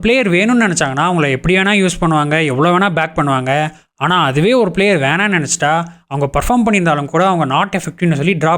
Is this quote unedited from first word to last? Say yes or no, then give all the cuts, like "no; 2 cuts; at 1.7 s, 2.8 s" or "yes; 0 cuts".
yes; 0 cuts